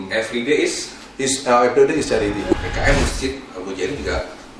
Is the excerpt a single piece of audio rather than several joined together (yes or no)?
no